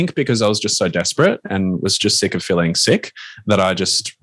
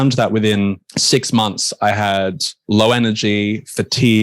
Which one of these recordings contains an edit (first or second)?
second